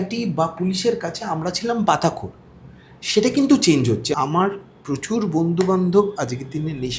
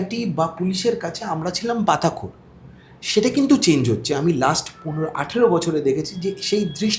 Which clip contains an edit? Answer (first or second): first